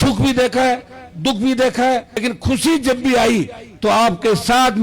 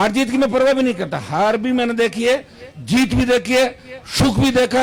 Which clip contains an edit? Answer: first; 1 cut; at 2.2 s

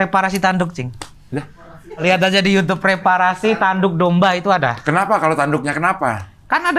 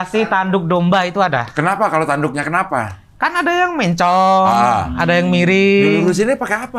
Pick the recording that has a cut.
first; 1 cut; at 2.0 s

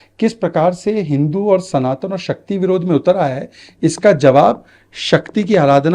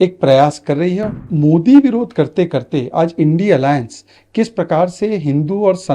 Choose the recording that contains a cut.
second; 1 cut; at 1.1 s

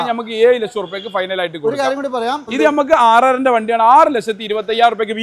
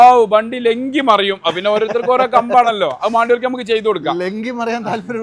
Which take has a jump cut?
first; 1 cut; at 2.5 s

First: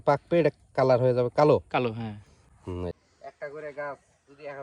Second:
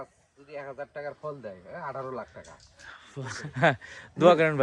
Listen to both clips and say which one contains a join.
first; 1 cut; at 2.9 s

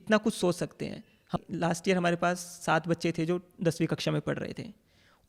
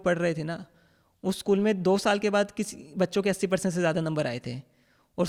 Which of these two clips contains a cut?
first; 1 cut; at 1.3 s

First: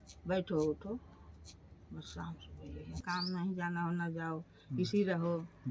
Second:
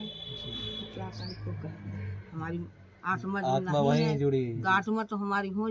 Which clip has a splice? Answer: first; 1 cut; at 3.0 s

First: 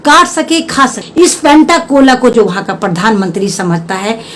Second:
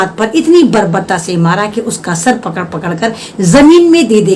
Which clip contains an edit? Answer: first; 1 cut; at 1.0 s

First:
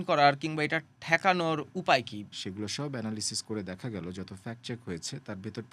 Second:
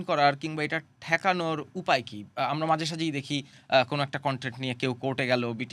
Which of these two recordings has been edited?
first; 1 cut; at 2.2 s

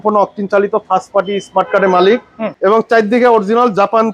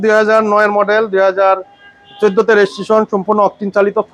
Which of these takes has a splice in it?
first; 1 cut; at 2.4 s

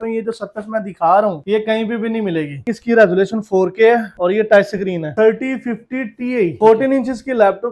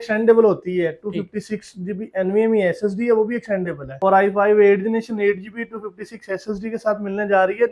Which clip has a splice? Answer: first; 3 cuts; at 2.7 s, 5.1 s, 6.6 s

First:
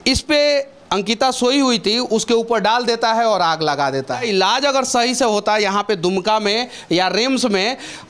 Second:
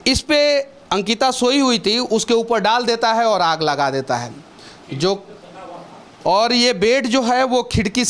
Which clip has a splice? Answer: first; 1 cut; at 4.2 s

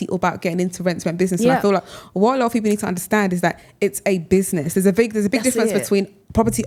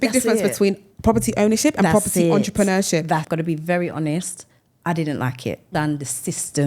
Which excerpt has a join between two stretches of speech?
second; 2 cuts; at 3.3 s, 5.6 s

